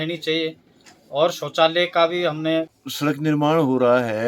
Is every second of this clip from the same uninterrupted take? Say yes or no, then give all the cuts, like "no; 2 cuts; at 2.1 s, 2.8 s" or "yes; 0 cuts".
no; 1 cut; at 2.8 s